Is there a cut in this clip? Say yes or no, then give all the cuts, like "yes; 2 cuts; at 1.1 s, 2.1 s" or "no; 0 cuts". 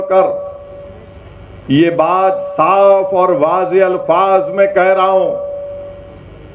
no; 0 cuts